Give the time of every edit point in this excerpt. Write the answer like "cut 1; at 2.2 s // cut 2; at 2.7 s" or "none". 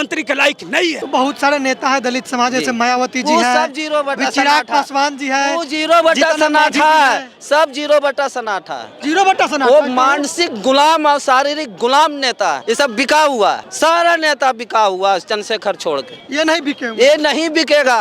cut 1; at 1.0 s // cut 2; at 12.6 s // cut 3; at 13.7 s